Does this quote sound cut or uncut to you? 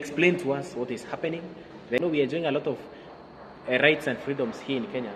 cut